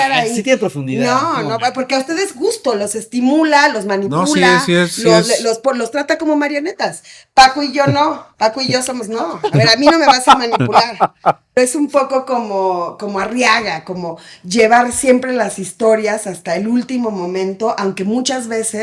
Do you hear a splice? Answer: yes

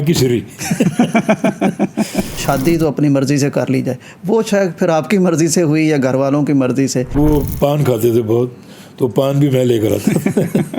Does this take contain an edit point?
yes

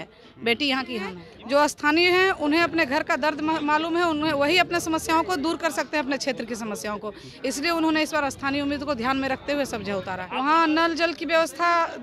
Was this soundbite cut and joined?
yes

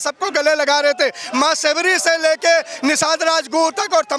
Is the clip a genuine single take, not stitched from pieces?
yes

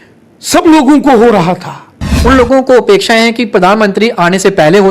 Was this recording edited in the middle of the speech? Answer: yes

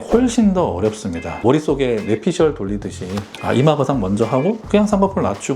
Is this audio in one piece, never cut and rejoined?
no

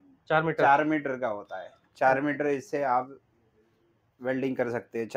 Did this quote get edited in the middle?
no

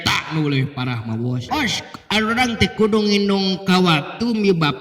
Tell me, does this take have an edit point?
yes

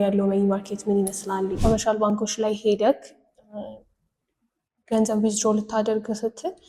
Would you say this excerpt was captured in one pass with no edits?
no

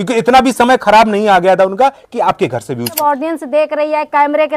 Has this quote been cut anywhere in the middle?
yes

